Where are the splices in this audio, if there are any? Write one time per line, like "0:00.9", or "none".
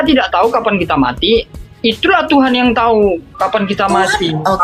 none